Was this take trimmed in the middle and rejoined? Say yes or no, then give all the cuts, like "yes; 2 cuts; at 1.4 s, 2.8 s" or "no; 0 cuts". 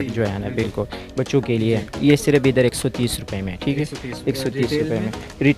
yes; 1 cut; at 1.0 s